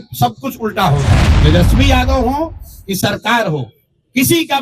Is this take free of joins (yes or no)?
no